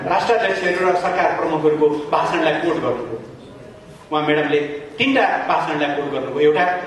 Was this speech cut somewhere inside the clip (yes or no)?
no